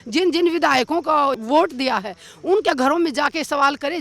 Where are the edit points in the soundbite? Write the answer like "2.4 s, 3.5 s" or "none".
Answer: 1.4 s